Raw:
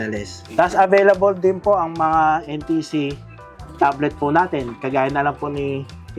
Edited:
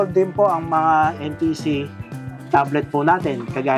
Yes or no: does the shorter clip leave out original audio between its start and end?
no